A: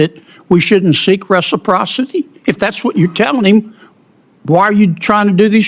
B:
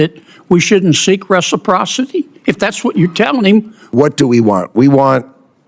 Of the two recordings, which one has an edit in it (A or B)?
B